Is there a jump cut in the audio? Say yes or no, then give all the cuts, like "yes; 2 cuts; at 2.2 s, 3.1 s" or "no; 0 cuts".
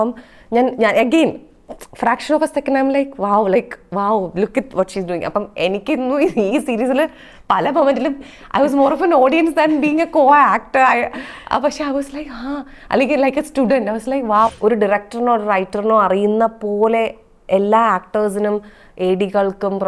yes; 1 cut; at 14.5 s